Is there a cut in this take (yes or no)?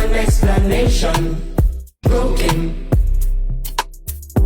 yes